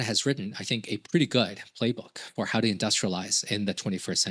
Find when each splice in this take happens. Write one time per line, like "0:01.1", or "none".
none